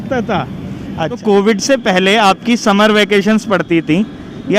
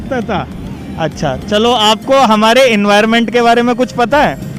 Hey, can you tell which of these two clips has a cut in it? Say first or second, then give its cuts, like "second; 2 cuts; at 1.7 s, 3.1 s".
first; 1 cut; at 1.2 s